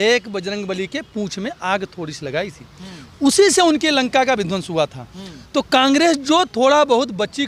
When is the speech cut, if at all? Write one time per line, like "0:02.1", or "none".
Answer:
none